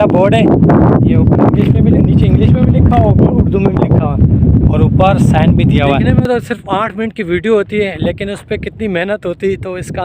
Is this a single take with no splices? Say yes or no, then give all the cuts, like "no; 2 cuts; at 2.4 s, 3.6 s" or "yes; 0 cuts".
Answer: no; 1 cut; at 6.2 s